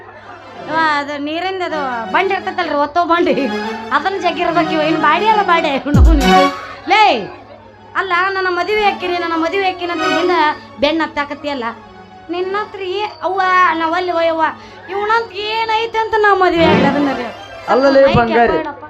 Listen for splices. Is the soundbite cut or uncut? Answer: uncut